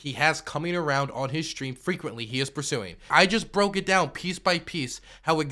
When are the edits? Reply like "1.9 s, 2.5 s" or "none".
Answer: 3.1 s